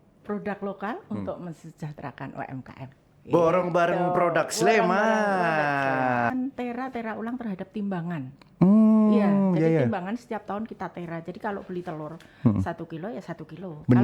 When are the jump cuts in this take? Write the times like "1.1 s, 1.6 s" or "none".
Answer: 6.3 s